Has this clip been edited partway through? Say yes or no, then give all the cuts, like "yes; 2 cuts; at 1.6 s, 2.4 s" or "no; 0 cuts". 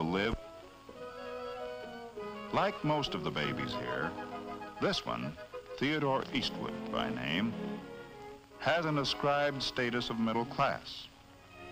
no; 0 cuts